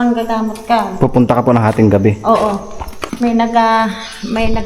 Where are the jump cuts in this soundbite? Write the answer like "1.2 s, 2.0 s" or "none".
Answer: 3.2 s